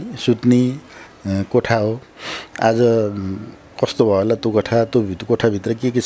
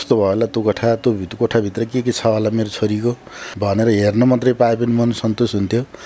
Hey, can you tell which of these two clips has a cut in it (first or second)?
second